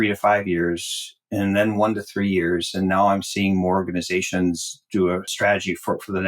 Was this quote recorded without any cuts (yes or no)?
no